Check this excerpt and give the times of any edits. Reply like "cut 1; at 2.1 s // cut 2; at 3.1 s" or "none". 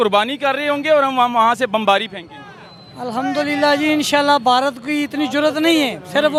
none